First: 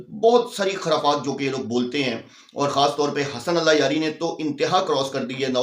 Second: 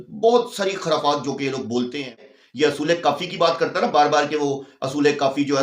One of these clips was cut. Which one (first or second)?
second